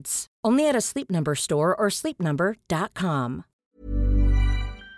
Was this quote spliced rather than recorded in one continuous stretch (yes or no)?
yes